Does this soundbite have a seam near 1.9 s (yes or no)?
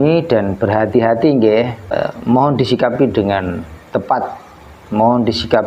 yes